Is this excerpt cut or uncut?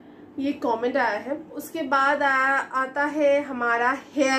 uncut